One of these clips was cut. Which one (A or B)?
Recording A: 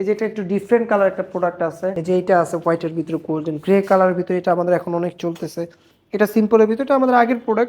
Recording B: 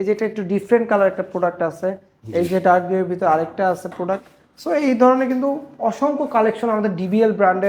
A